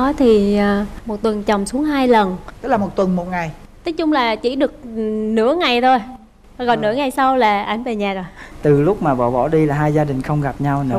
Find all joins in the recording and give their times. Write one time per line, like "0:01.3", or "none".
0:02.4
0:08.5

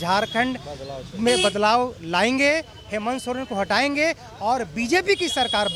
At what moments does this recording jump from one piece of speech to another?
none

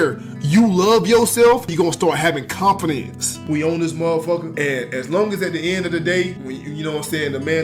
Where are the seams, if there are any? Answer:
0:01.7
0:03.3
0:04.5
0:06.4

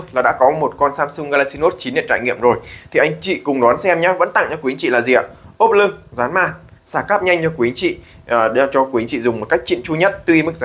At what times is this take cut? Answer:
none

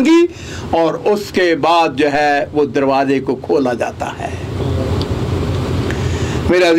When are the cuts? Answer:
none

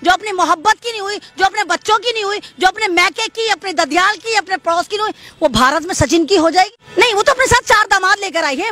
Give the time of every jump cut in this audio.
0:06.8

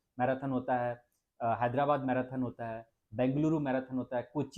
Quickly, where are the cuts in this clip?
none

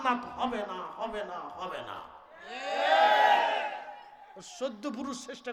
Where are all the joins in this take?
none

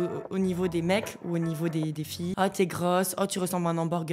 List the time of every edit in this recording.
0:02.3

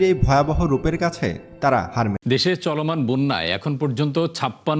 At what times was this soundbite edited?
0:02.2

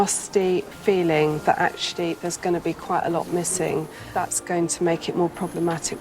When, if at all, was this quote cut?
0:04.2

